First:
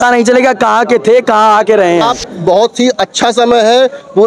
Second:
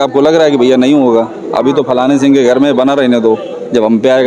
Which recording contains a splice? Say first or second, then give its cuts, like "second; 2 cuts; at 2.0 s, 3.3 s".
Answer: first; 1 cut; at 2.3 s